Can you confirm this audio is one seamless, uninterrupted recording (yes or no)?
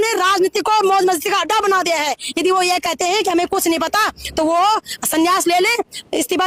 yes